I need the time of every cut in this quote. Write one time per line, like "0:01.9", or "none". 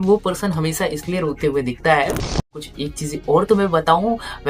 0:02.6

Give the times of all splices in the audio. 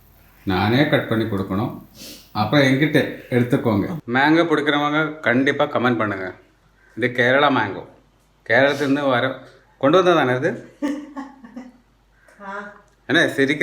0:04.0

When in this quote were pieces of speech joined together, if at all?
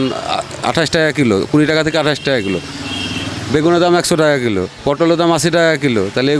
none

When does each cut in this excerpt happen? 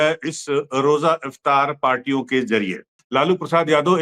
0:03.0

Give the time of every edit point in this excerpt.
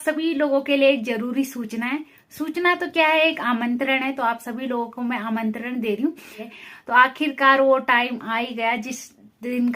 0:06.5

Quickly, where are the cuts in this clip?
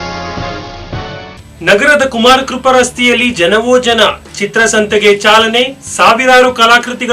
0:01.3

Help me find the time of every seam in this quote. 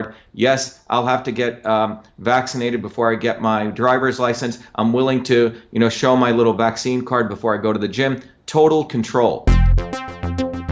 0:09.4

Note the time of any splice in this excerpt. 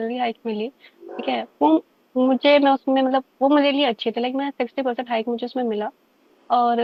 none

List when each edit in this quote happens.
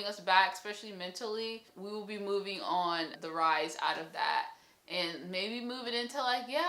0:01.7
0:03.2

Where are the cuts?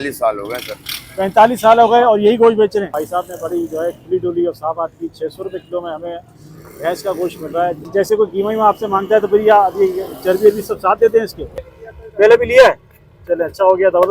0:02.9
0:07.8
0:11.8

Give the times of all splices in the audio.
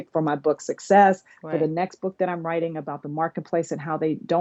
none

